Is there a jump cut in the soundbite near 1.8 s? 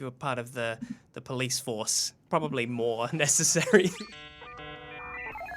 no; 1 cut; at 4.0 s

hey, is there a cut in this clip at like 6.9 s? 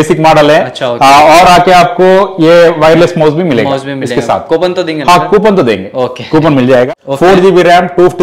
yes; 1 cut; at 6.9 s

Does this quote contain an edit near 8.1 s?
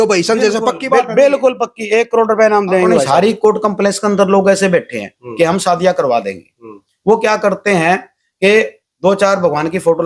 no; 1 cut; at 3.1 s

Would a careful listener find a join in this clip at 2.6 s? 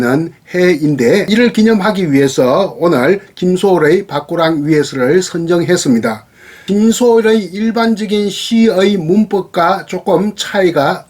no; 2 cuts; at 1.2 s, 6.5 s

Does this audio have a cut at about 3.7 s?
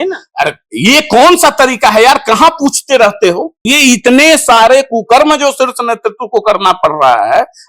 yes; 1 cut; at 3.7 s

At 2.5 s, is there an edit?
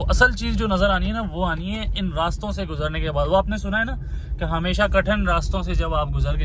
no; 0 cuts

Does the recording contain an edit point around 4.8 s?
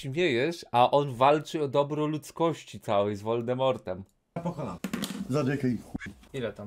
yes; 1 cut; at 4.8 s

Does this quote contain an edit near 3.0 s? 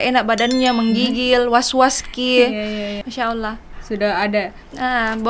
yes; 1 cut; at 3.0 s

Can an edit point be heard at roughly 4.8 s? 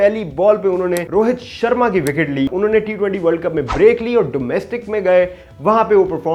no; 2 cuts; at 1.1 s, 2.5 s

